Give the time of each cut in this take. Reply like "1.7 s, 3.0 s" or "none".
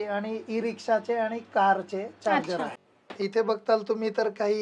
2.8 s